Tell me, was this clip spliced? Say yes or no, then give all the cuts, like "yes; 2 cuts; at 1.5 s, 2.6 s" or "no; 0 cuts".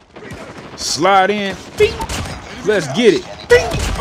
yes; 1 cut; at 0.9 s